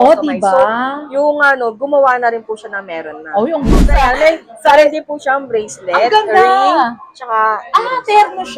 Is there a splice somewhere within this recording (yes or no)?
yes